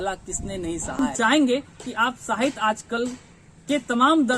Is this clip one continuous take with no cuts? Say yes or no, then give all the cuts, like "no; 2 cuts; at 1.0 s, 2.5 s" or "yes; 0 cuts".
no; 1 cut; at 1.0 s